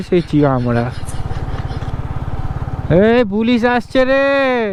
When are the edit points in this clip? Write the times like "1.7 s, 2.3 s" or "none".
none